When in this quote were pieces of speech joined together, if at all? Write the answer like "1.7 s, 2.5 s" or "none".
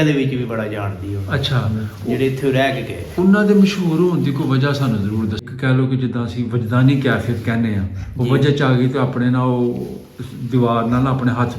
5.5 s